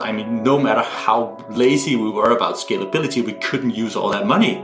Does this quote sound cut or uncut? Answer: uncut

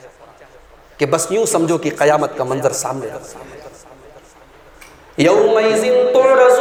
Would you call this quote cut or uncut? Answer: uncut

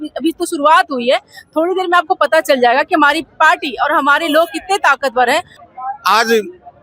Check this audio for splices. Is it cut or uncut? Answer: cut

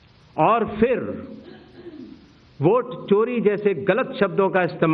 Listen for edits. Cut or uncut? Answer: uncut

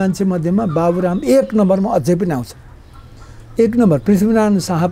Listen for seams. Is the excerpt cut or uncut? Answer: uncut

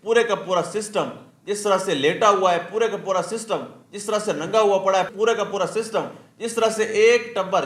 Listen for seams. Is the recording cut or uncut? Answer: uncut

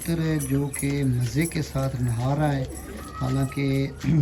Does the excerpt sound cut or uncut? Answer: uncut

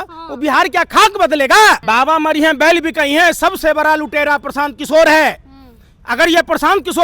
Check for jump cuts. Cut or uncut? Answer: cut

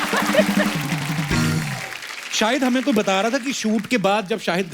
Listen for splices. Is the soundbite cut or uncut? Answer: uncut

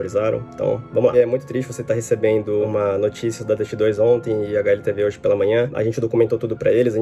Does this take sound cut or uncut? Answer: cut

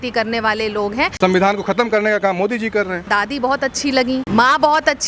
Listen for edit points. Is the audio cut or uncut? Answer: cut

